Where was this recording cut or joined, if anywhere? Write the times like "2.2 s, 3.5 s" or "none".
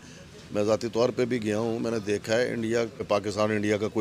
3.0 s